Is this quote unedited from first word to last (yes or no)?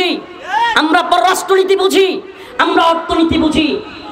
yes